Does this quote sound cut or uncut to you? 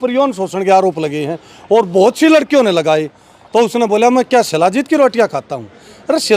uncut